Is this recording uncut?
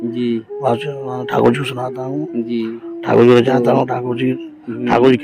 yes; 0 cuts

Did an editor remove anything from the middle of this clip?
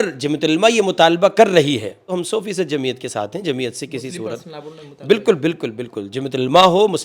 yes; 1 cut; at 2.1 s

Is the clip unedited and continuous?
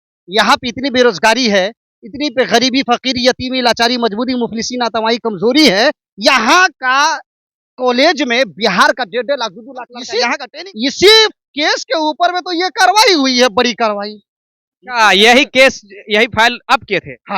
no; 1 cut; at 10.3 s

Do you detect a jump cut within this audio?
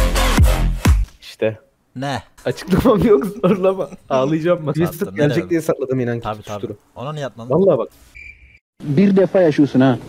no; 0 cuts

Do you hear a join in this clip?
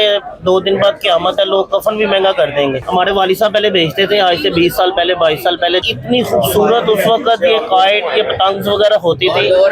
yes; 2 cuts; at 2.8 s, 5.8 s

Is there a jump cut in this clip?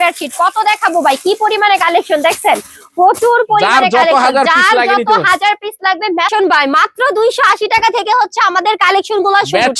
yes; 1 cut; at 6.3 s

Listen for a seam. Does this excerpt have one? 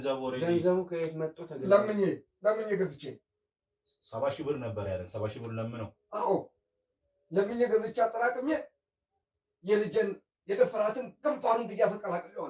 no; 0 cuts

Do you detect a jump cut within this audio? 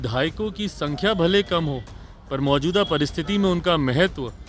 no; 0 cuts

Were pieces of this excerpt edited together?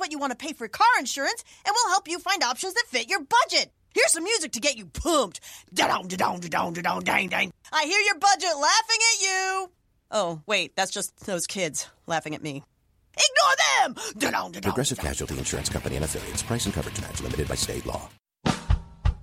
yes; 1 cut; at 18.1 s

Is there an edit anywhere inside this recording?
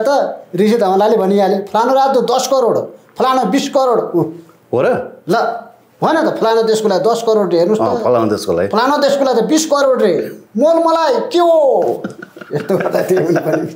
no; 0 cuts

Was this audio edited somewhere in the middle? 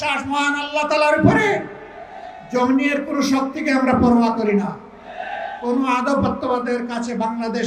no; 0 cuts

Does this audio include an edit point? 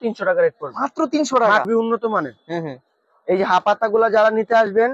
yes; 1 cut; at 1.7 s

